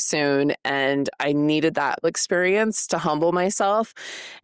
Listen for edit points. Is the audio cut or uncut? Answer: cut